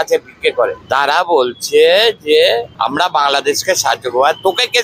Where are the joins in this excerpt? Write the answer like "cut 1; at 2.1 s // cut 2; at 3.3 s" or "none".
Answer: cut 1; at 2.7 s